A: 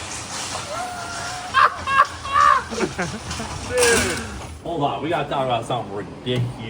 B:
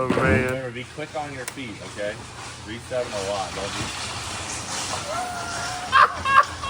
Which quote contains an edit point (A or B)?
A